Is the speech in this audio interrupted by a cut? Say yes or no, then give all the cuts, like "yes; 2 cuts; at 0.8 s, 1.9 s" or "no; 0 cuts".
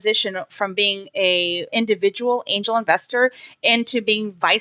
no; 0 cuts